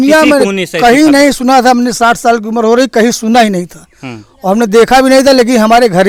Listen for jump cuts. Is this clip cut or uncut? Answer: uncut